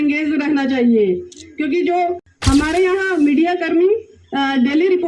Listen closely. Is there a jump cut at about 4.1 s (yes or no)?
no